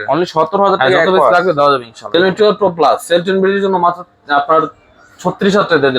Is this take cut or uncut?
cut